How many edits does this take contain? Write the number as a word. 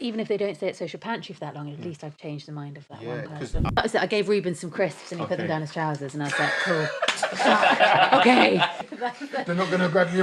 two